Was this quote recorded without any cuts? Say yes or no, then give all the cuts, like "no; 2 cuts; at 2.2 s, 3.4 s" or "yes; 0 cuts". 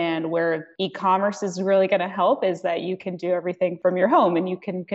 yes; 0 cuts